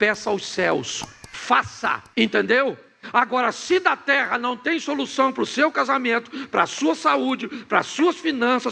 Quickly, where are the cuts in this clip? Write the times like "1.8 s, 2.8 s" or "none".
2.0 s